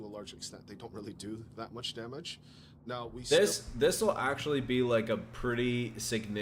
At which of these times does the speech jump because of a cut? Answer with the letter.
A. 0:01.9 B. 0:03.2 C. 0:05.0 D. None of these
D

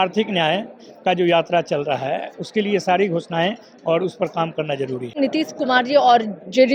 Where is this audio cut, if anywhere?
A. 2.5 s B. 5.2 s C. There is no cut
B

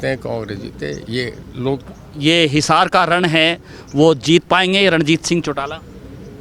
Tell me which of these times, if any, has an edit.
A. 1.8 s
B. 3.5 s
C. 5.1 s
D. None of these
A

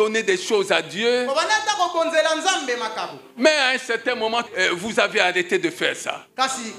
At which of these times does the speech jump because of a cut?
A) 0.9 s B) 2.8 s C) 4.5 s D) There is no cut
D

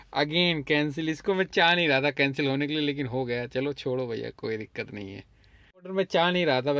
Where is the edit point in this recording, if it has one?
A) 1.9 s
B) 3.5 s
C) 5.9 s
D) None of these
C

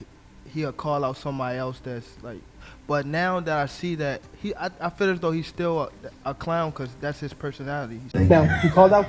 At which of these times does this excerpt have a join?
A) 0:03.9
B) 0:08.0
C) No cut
B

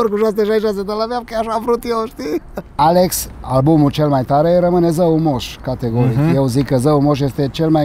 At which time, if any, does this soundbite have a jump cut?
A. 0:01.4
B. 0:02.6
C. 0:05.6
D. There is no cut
B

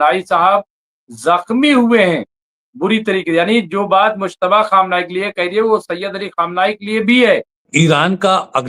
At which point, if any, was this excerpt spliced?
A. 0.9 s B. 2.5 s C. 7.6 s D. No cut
C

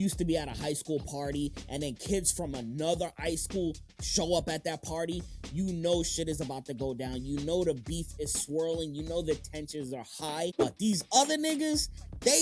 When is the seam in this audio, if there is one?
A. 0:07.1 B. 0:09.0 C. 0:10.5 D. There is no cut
C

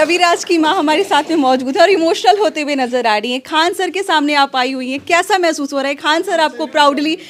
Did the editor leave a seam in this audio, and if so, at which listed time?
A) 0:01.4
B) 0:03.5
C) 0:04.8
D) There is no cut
D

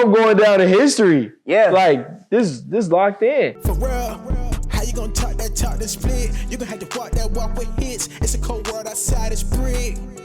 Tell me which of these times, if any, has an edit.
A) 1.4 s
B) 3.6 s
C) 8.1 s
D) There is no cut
B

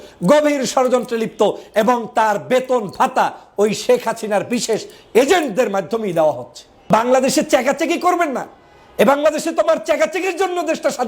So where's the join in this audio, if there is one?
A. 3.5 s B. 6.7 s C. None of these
B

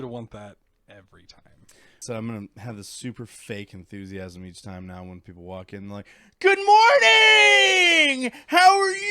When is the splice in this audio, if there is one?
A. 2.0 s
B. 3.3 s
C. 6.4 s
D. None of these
A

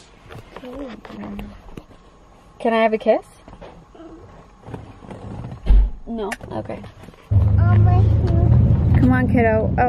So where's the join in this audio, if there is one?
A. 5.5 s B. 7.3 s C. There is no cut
B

